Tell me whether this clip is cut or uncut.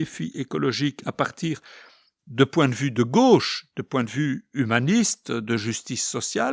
uncut